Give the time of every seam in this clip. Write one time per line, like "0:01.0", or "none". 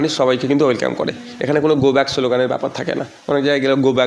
none